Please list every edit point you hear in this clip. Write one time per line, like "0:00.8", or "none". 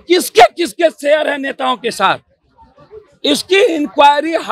none

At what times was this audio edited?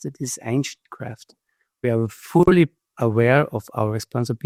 none

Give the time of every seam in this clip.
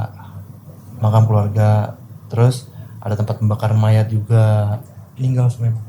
0:04.8

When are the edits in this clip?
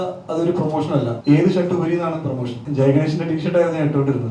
0:01.1
0:02.6

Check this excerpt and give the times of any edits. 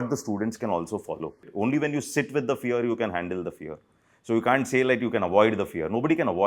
0:01.5

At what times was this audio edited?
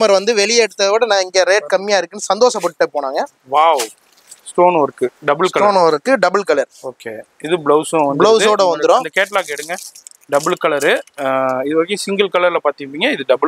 none

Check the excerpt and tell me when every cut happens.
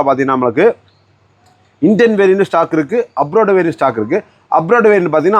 none

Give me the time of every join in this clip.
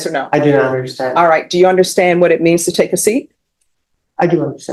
none

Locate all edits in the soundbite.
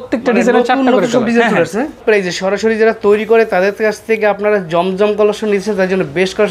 0:02.0

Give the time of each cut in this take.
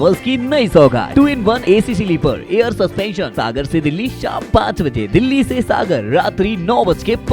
0:01.2
0:03.3

